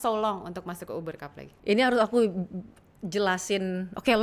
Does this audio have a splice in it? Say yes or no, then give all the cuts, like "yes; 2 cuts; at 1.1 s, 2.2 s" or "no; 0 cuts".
no; 0 cuts